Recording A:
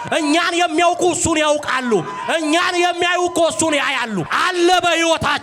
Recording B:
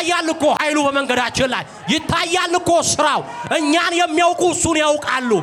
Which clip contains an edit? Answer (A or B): A